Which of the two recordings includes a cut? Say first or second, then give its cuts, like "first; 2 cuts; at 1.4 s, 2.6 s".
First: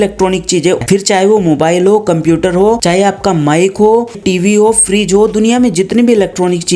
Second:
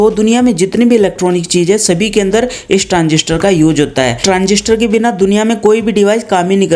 first; 3 cuts; at 0.8 s, 2.8 s, 4.2 s